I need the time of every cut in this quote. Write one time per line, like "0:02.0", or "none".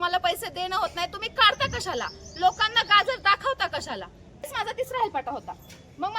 0:04.5